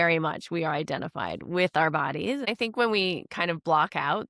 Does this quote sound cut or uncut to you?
cut